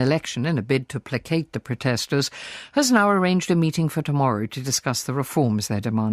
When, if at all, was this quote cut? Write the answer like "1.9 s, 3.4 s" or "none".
3.1 s